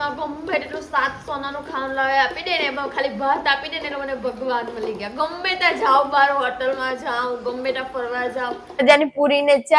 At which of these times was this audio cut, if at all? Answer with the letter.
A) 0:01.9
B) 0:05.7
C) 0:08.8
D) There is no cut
C